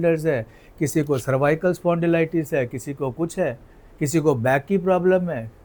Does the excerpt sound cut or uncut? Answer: uncut